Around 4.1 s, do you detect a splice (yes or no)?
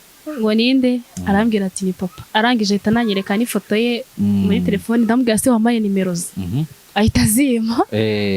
no